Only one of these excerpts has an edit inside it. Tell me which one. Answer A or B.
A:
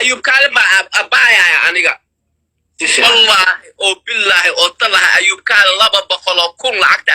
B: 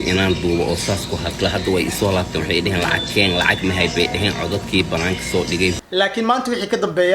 B